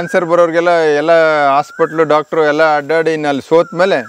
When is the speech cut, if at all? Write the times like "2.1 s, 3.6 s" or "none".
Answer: none